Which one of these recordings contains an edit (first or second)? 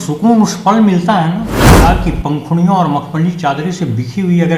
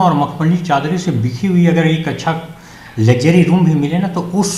first